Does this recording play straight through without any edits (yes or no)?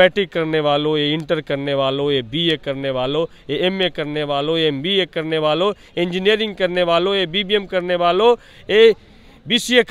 yes